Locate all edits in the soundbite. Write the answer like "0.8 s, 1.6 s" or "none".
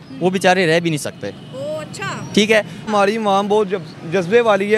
2.9 s